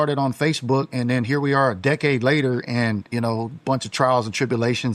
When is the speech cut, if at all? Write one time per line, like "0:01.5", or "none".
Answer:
none